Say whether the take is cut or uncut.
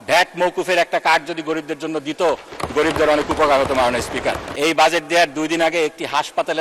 cut